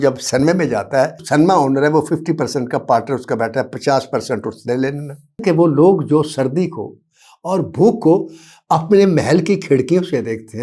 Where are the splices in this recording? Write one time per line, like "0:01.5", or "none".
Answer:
0:01.2
0:05.4